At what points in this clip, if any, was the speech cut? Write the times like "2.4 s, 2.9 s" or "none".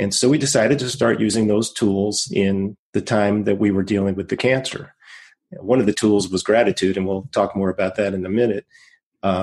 2.8 s